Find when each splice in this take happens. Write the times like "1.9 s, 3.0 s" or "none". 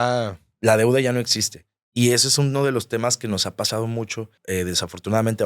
4.3 s